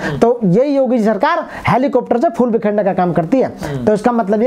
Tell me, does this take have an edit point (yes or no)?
no